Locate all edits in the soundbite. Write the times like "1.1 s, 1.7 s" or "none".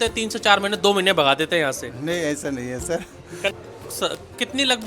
3.5 s